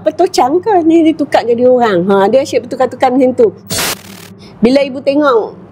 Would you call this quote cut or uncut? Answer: cut